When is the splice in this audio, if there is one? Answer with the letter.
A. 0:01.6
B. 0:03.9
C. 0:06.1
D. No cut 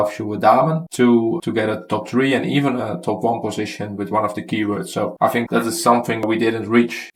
D